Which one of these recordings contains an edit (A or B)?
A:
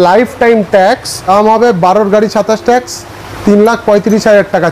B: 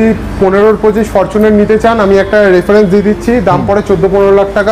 A